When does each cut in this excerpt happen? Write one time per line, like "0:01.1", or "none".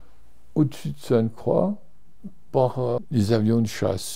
0:03.0

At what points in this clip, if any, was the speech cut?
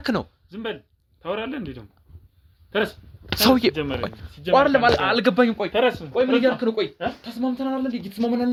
none

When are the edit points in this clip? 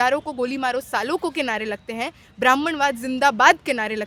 none

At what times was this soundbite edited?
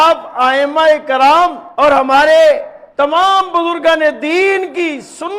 0:01.6
0:02.8

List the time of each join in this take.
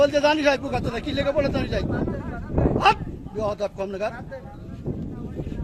none

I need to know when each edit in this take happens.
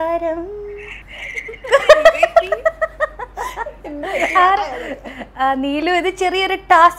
none

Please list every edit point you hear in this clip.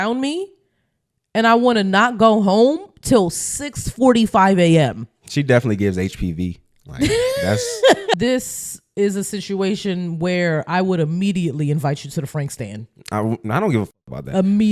0:08.1

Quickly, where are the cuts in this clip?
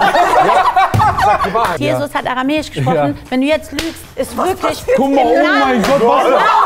0:01.8

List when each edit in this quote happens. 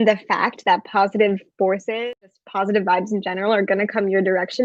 0:02.0

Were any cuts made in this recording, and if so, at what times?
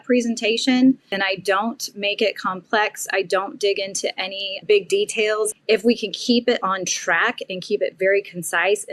0:01.1
0:04.5
0:05.5

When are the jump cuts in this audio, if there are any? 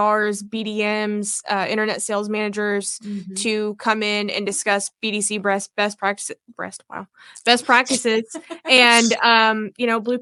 none

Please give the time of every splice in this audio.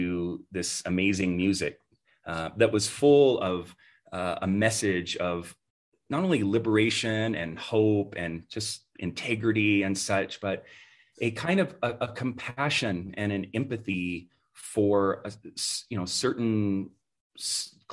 none

